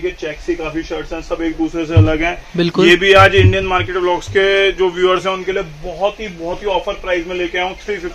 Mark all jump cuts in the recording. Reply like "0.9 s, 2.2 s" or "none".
none